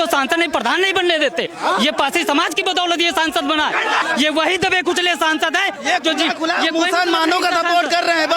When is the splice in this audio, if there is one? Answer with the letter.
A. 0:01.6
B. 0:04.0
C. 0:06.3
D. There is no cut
B